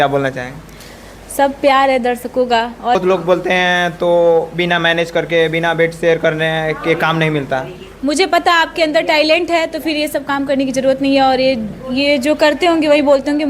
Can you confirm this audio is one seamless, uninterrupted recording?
no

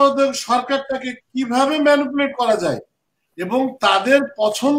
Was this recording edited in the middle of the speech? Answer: no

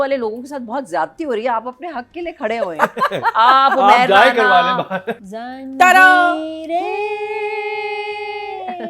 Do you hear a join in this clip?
yes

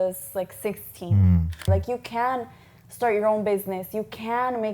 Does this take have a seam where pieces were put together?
yes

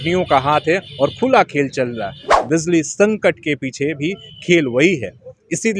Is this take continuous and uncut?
no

